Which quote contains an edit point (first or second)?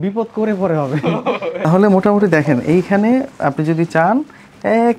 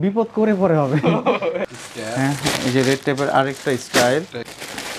second